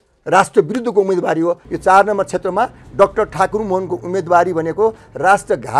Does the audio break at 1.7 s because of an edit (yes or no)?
yes